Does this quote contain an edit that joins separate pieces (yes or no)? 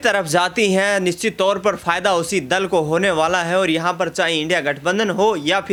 no